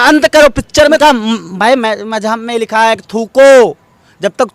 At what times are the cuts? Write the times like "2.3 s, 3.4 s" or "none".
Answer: 1.0 s